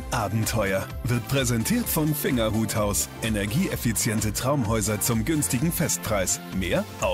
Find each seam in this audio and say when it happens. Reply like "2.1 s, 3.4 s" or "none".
none